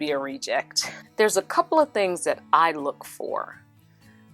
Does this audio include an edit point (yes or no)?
yes